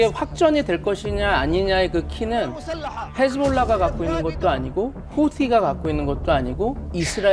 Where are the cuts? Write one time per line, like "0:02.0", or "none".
none